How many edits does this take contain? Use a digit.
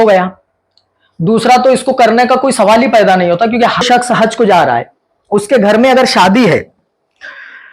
1